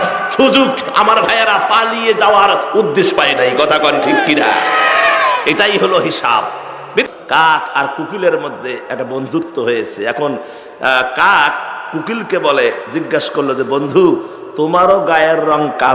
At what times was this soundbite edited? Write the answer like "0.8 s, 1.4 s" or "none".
7.0 s